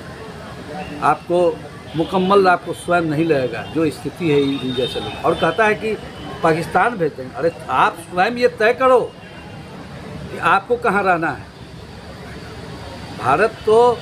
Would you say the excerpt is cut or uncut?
uncut